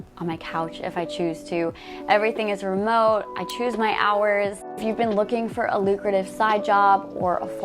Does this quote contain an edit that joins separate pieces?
yes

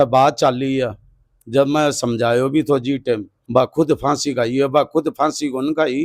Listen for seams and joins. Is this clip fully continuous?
no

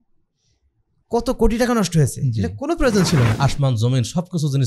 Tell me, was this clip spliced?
yes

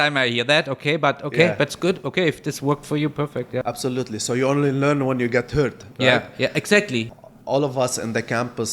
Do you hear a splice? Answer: yes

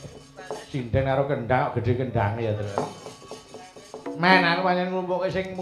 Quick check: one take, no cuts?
yes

